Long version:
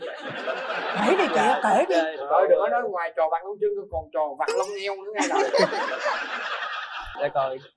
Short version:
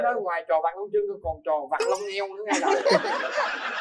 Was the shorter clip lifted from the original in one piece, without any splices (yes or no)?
yes